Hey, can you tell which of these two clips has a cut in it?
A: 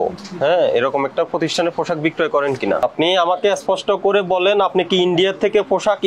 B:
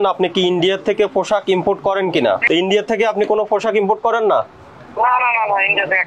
A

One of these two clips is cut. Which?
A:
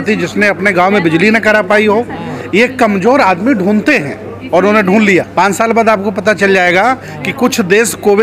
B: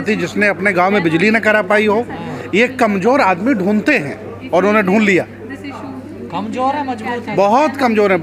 A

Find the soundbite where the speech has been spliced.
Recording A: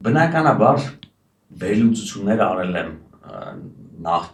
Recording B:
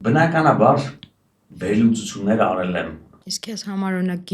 B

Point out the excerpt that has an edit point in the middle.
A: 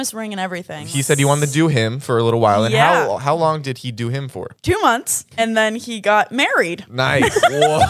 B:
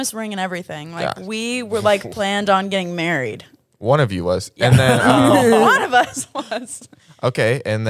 A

